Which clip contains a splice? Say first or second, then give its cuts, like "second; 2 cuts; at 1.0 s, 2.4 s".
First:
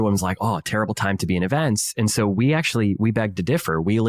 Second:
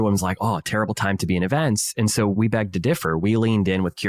second; 1 cut; at 2.3 s